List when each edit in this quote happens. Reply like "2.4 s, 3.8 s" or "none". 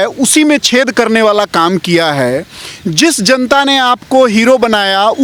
none